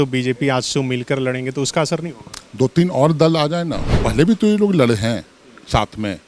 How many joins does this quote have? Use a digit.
1